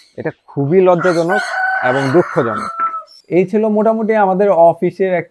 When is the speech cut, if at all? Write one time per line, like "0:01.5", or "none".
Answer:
0:03.1